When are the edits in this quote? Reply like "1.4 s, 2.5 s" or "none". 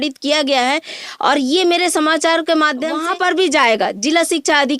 2.9 s

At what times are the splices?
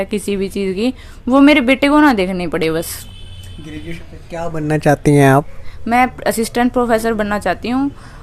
4.0 s

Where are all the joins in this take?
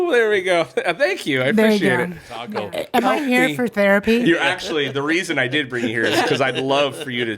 2.5 s

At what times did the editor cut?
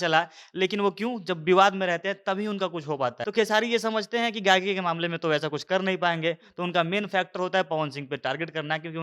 3.2 s

